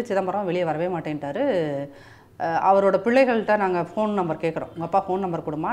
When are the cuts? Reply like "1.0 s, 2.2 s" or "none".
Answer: none